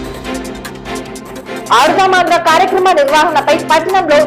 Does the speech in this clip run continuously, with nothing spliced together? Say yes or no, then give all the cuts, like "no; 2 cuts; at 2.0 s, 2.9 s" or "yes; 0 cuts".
yes; 0 cuts